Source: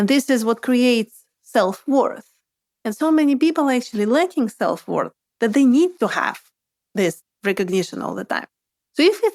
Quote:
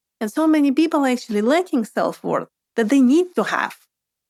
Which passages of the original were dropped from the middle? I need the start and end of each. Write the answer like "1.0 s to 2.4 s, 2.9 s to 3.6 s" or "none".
none